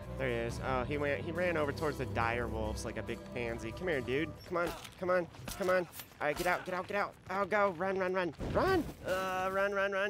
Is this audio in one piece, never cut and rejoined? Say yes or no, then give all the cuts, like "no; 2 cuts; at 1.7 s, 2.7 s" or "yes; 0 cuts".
yes; 0 cuts